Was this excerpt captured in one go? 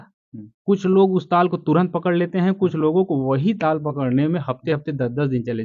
yes; 0 cuts

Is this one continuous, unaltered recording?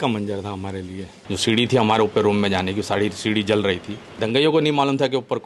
no; 2 cuts; at 1.1 s, 4.0 s

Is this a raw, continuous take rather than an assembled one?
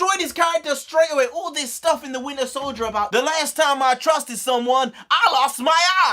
no; 1 cut; at 3.1 s

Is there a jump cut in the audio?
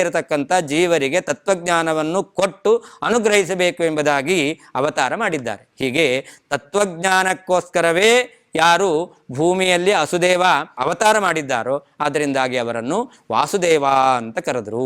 yes; 1 cut; at 10.7 s

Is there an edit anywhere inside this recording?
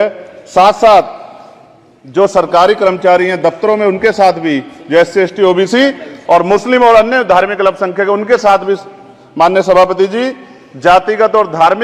no; 0 cuts

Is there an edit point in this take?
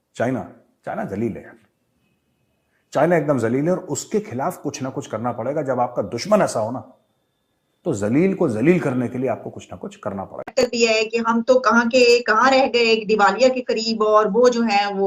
yes; 1 cut; at 10.6 s

